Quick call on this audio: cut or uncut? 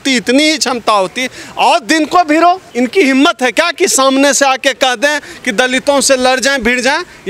cut